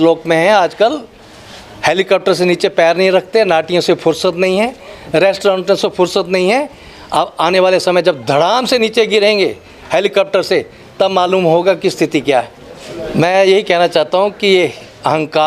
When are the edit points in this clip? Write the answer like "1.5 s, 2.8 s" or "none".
12.9 s